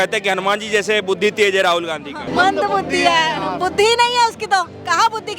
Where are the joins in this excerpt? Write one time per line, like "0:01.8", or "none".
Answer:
0:02.1